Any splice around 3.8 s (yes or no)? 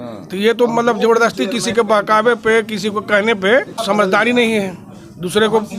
yes